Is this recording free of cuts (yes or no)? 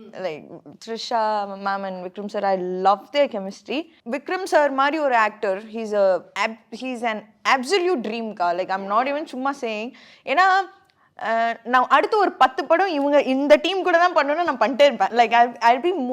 no